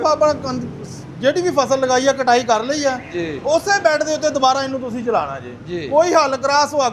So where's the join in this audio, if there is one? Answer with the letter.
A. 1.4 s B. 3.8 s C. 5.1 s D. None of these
D